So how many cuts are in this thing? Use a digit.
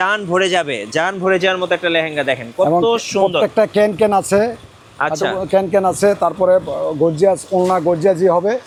0